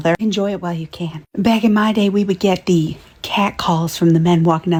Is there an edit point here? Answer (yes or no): no